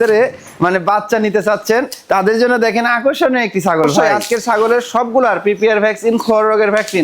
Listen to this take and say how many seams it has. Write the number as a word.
one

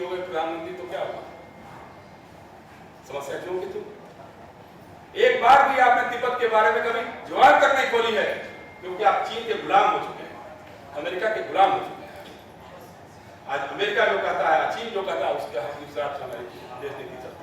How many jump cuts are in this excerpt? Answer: zero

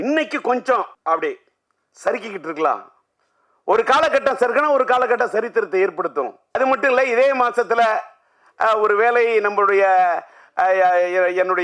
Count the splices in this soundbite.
two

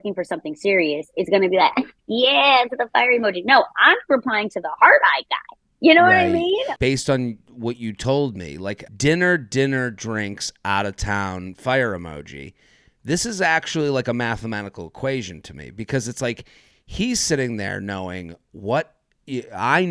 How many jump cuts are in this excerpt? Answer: two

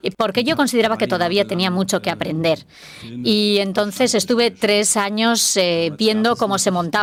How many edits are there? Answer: zero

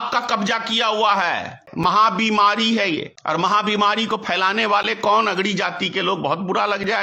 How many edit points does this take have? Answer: two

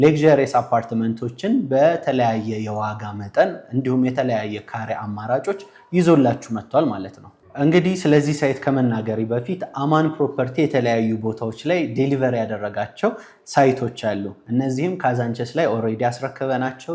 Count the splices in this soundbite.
zero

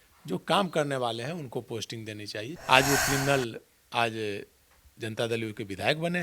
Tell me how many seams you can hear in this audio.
one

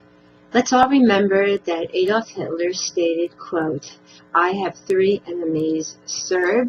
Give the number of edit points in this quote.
one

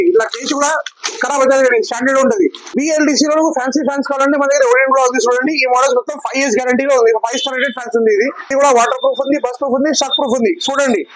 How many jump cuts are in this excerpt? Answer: two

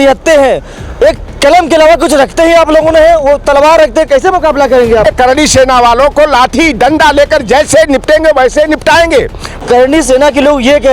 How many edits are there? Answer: two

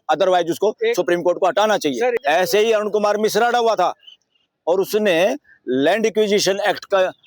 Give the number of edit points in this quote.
one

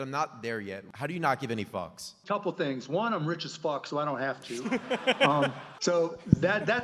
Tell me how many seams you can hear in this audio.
three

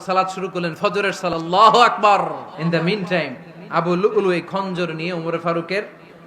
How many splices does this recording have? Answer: two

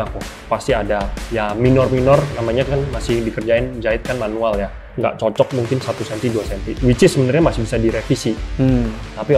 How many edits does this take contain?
two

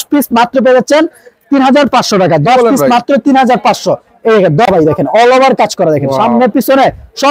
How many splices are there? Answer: one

